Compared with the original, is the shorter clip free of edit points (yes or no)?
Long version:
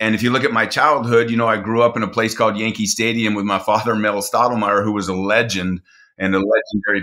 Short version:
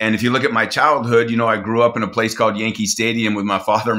yes